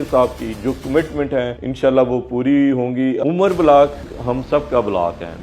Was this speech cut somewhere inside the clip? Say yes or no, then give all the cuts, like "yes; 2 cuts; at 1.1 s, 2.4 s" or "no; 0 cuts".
yes; 1 cut; at 3.2 s